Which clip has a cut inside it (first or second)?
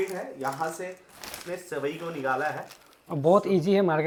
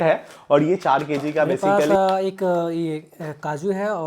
second